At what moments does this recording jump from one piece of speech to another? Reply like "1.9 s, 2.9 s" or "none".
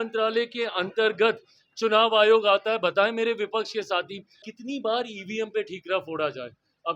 4.5 s